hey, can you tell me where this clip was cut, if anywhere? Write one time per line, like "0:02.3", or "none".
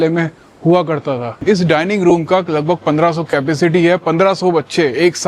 0:01.4